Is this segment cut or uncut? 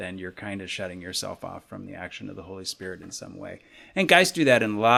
uncut